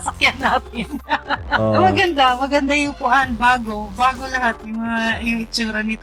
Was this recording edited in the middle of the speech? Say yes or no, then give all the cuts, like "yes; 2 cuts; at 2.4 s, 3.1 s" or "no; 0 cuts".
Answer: no; 0 cuts